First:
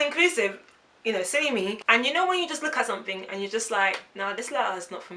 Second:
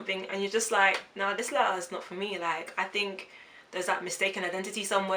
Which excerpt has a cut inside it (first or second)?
first